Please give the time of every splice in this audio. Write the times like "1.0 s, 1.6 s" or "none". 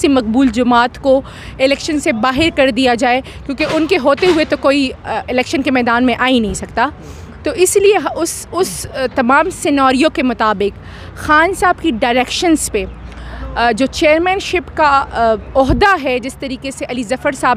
none